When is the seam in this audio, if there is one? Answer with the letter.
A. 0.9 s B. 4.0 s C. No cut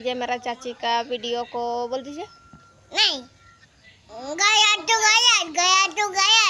B